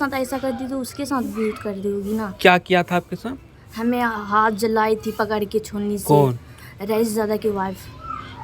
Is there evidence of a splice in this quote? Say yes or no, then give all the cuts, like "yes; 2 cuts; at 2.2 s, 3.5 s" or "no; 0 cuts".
no; 0 cuts